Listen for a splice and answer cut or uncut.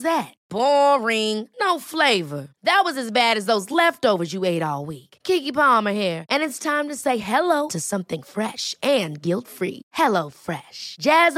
uncut